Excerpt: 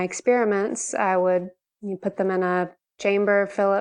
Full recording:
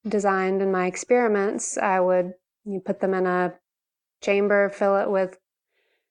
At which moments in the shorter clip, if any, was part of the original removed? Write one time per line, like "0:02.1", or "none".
0:02.8